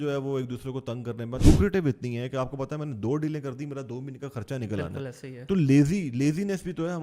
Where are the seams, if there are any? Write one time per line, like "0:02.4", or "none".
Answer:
0:01.4